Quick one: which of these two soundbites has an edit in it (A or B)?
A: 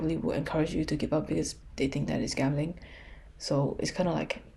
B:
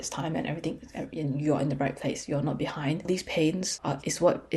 B